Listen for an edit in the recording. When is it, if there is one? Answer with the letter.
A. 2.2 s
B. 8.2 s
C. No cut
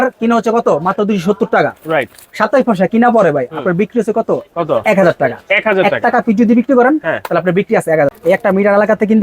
B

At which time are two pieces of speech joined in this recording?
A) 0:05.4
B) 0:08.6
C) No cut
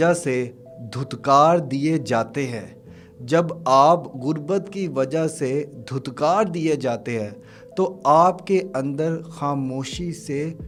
C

